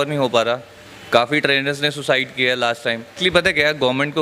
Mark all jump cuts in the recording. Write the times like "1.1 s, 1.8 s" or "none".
3.2 s